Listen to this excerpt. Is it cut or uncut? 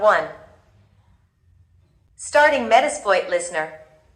cut